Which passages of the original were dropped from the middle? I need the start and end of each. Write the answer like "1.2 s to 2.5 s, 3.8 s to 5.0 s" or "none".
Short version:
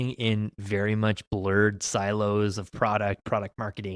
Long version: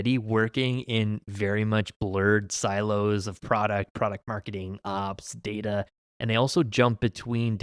none